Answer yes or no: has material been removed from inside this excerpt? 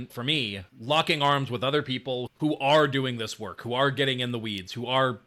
no